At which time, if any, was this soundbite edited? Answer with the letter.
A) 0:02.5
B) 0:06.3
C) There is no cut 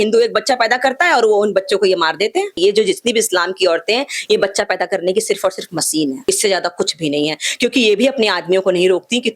A